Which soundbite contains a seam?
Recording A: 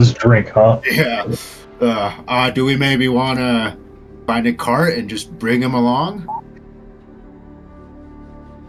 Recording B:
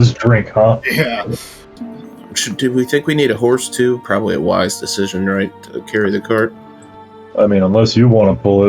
B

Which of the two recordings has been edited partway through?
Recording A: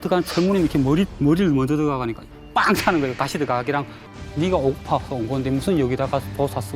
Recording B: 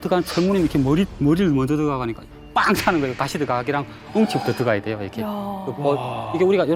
A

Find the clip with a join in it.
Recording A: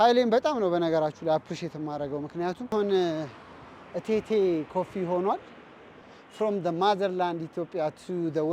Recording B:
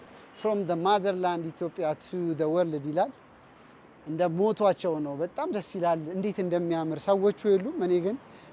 A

